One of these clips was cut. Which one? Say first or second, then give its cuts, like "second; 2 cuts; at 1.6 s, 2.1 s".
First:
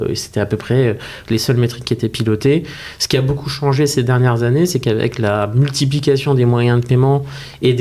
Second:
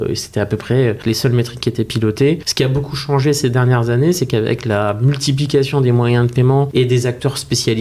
second; 3 cuts; at 1.0 s, 2.5 s, 6.7 s